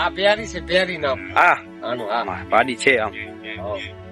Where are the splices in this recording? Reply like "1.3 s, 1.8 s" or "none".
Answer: none